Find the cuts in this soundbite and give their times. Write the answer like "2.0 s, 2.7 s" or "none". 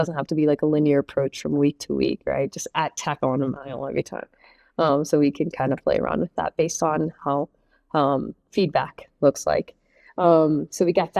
none